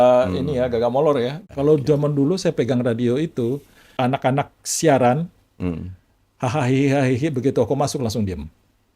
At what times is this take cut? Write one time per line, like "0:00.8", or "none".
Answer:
0:01.4
0:03.8